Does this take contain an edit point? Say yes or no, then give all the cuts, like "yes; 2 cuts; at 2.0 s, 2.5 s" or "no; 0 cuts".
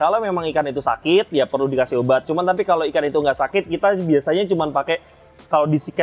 no; 0 cuts